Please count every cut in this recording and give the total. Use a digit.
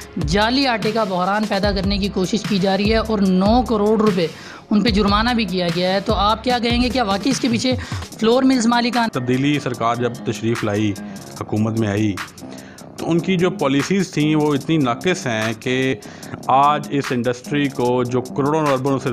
2